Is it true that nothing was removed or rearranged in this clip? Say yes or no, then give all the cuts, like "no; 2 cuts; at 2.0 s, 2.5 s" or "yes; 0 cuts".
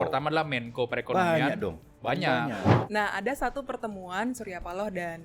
no; 1 cut; at 2.8 s